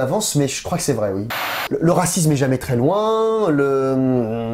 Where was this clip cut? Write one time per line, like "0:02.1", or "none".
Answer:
0:01.2